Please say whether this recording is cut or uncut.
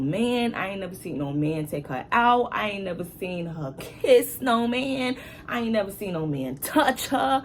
uncut